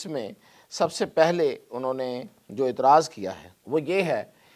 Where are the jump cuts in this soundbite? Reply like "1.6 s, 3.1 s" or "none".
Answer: 3.5 s